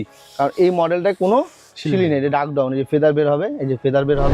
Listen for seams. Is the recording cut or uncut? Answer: uncut